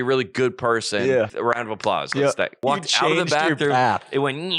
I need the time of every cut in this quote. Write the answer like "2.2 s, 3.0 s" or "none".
1.3 s, 2.6 s